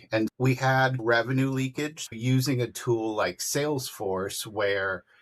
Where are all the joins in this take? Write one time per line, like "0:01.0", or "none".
0:01.0
0:02.1